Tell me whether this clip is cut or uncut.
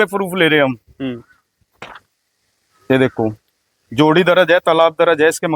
uncut